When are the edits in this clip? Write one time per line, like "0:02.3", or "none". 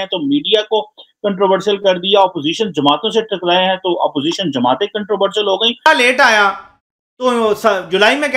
0:05.8